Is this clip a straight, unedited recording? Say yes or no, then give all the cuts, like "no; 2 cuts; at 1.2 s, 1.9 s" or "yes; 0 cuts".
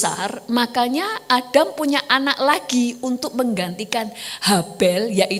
yes; 0 cuts